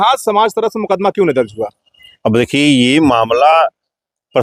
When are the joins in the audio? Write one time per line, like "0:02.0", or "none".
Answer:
none